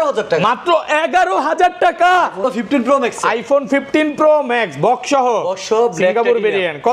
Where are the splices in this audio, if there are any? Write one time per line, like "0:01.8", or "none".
0:02.5